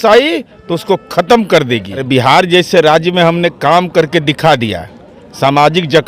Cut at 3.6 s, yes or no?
no